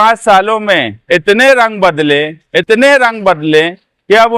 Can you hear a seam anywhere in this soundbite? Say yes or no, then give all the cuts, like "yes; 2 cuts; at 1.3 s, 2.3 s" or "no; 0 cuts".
no; 0 cuts